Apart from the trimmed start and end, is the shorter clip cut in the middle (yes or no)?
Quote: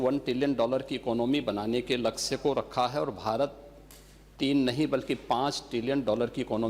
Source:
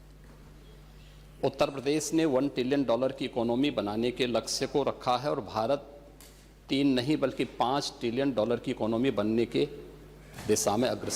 no